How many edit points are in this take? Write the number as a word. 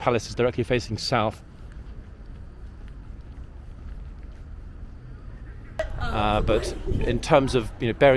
one